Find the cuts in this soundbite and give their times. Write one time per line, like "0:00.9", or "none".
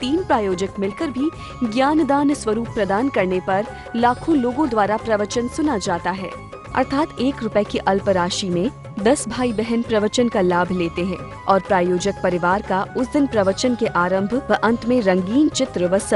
none